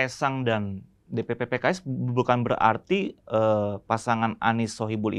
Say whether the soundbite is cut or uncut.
uncut